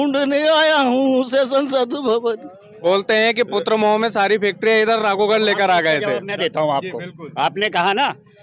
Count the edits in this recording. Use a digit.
1